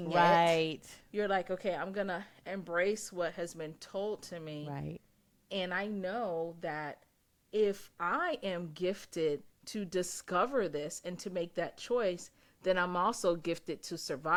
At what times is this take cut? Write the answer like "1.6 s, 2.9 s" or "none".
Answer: none